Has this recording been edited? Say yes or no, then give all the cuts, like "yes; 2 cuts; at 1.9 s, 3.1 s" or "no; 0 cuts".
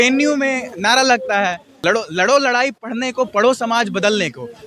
yes; 1 cut; at 1.7 s